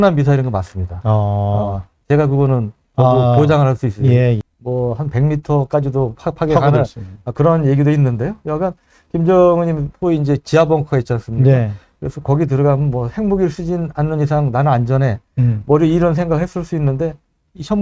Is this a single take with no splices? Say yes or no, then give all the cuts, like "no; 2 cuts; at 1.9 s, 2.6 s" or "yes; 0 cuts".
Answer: no; 1 cut; at 4.4 s